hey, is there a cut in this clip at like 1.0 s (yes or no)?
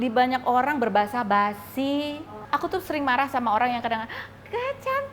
no